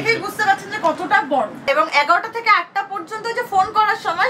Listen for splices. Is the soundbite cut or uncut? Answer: cut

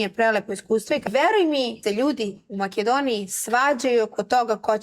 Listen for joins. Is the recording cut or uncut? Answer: cut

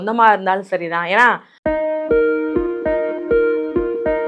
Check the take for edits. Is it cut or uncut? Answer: cut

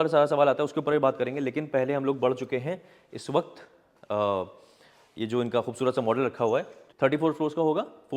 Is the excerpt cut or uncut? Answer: cut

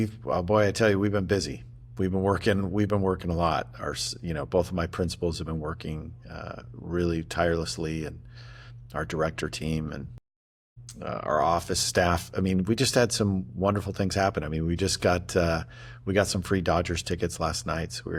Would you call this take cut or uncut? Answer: uncut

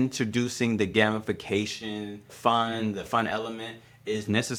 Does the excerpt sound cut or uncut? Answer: uncut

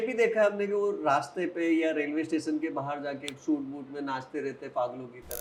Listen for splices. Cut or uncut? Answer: uncut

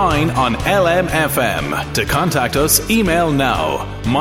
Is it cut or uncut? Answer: uncut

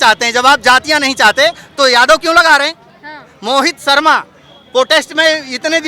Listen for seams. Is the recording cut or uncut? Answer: uncut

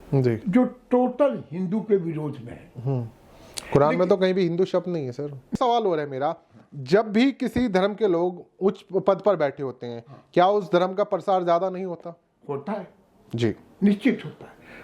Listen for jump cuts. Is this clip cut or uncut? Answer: cut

